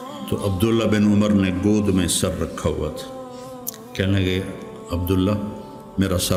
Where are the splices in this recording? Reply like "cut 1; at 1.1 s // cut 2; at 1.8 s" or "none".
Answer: none